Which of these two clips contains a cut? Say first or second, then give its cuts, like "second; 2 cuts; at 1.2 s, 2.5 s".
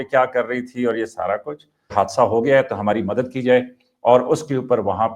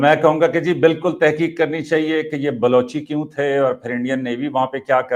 first; 1 cut; at 1.9 s